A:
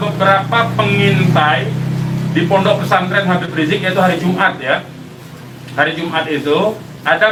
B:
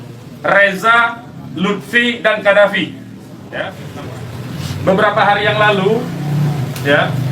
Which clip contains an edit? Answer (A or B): B